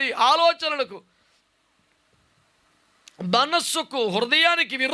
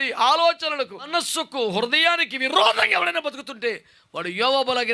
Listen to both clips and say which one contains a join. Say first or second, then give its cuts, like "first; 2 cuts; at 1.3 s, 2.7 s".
second; 1 cut; at 1.1 s